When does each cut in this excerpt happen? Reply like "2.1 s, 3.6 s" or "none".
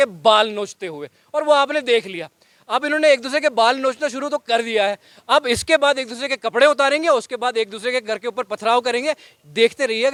none